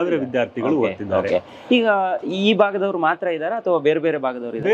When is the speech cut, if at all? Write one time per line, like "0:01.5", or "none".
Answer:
none